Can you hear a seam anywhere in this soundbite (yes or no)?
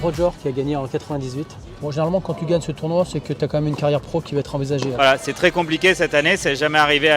yes